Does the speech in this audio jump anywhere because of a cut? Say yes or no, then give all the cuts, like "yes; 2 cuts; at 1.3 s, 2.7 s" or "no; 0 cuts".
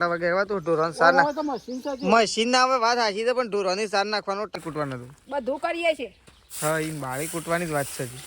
yes; 1 cut; at 4.6 s